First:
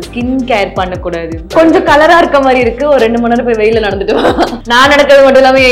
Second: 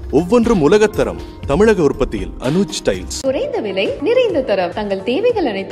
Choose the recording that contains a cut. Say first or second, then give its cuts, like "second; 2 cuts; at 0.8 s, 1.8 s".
first; 2 cuts; at 1.5 s, 4.6 s